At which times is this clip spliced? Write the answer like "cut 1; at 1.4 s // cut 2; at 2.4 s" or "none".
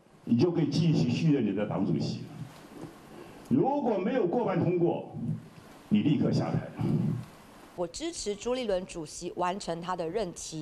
cut 1; at 7.8 s